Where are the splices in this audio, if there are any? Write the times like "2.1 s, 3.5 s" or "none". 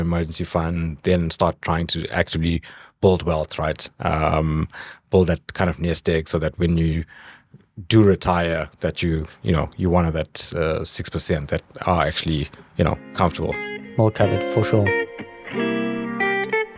14.9 s